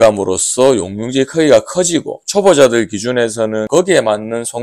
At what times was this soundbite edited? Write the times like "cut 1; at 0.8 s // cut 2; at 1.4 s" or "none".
cut 1; at 3.7 s